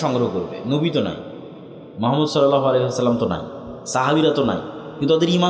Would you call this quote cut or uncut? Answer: uncut